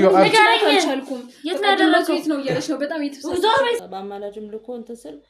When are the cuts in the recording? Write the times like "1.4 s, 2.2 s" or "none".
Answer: 3.8 s